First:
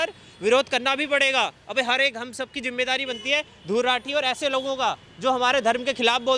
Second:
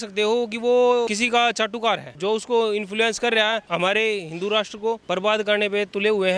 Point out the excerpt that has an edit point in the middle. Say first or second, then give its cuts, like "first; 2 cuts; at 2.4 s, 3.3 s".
second; 4 cuts; at 1.1 s, 2.1 s, 3.6 s, 5.0 s